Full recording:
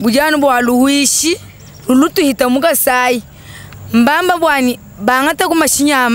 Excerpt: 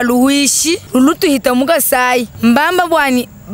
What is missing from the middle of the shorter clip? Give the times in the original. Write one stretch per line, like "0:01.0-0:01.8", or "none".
0:01.4-0:01.8
0:03.3-0:03.8